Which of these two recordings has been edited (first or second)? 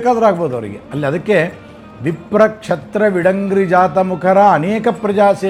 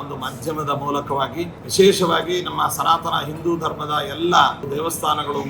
second